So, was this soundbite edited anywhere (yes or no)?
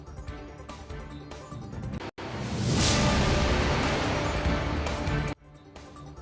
yes